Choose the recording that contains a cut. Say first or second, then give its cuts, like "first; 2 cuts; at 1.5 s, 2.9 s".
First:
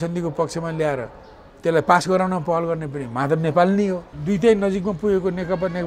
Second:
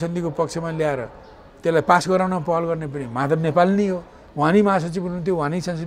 first; 1 cut; at 4.1 s